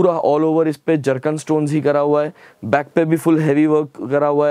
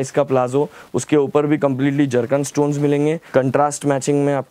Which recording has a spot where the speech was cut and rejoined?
second; 1 cut; at 3.2 s

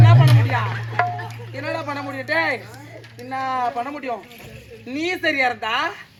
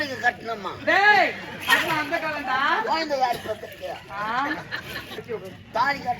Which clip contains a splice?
second; 1 cut; at 5.2 s

